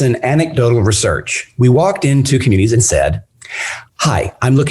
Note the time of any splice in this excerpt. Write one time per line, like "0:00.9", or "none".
none

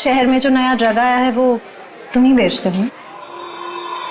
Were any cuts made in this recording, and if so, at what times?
none

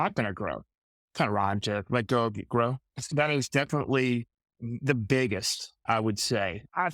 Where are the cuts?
0:03.1

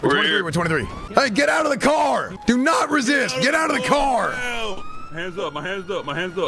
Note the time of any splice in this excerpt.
0:01.0
0:02.3

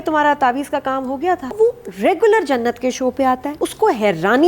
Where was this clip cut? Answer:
0:01.5
0:03.5

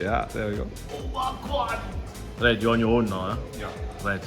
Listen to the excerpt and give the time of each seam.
0:02.2

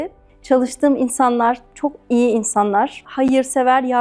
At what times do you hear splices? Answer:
0:01.7
0:03.1

